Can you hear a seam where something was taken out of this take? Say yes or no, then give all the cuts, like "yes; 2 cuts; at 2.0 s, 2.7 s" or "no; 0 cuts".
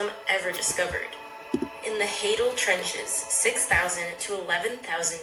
no; 0 cuts